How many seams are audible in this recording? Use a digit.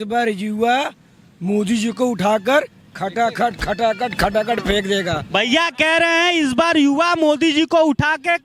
0